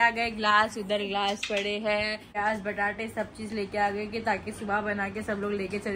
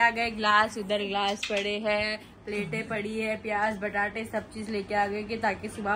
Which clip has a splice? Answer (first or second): first